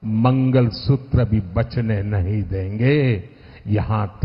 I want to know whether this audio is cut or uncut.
uncut